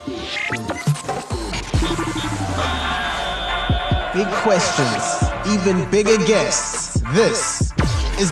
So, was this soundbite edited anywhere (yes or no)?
no